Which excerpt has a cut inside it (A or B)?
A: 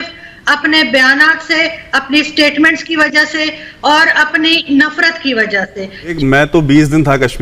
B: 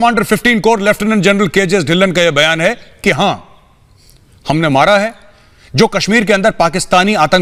A